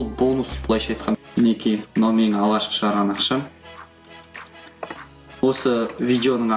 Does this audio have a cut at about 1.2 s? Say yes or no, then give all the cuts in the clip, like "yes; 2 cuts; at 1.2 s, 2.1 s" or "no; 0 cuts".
yes; 1 cut; at 1.2 s